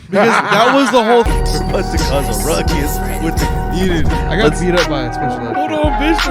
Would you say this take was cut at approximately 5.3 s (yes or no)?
no